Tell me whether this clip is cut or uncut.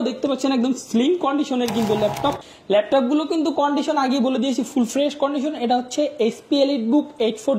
cut